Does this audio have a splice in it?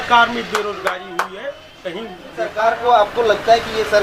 yes; 1 cut; at 2.5 s

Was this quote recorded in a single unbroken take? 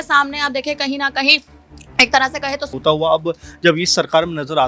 no; 1 cut; at 2.8 s

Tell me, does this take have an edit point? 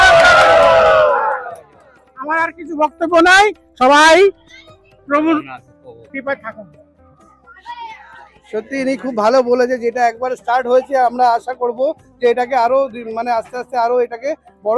no; 0 cuts

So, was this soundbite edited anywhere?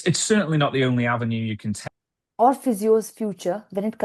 yes; 1 cut; at 1.8 s

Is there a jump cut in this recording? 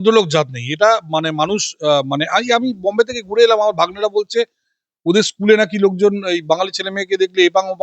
no; 0 cuts

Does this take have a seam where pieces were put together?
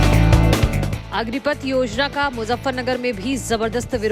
no; 0 cuts

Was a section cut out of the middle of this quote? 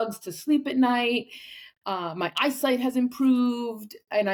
no; 0 cuts

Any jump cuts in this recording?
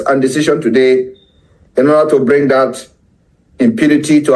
no; 0 cuts

